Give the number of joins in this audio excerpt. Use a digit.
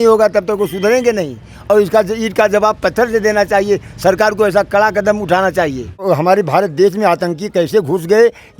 1